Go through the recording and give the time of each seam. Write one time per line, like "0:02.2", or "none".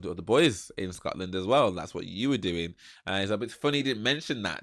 none

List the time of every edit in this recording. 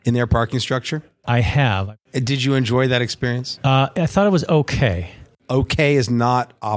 0:01.1
0:02.0
0:03.5
0:05.3

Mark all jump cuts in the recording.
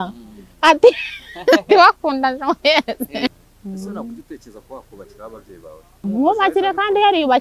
0:03.4
0:06.0

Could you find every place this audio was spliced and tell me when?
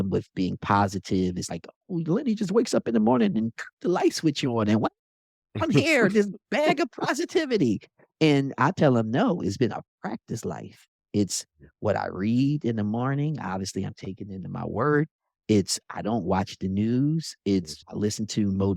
none

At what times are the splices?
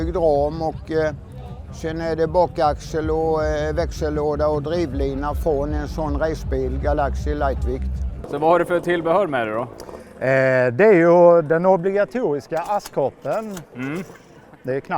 0:08.1

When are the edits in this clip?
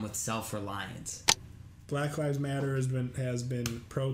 0:01.4

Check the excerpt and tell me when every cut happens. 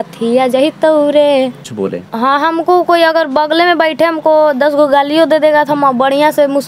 0:01.8

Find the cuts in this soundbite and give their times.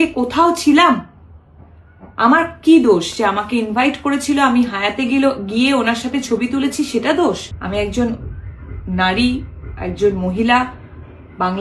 0:07.5

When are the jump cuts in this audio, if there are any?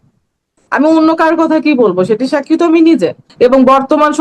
0:03.2

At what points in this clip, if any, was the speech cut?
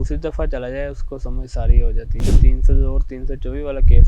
0:02.2

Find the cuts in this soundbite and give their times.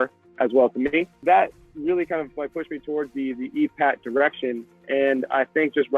0:01.2

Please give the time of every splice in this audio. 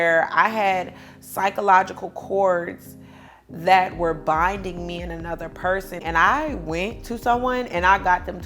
0:05.9

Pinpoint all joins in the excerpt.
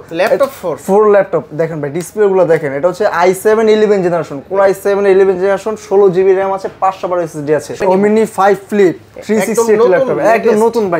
0:07.8

